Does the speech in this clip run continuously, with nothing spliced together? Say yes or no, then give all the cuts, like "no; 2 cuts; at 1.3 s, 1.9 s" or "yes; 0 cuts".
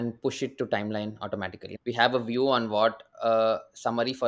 yes; 0 cuts